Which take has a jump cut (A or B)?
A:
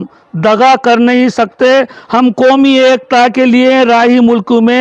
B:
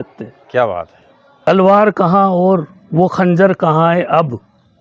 B